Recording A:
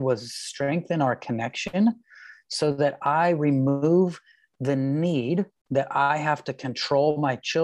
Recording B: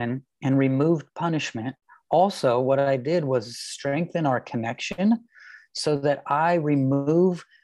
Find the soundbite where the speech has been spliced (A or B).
A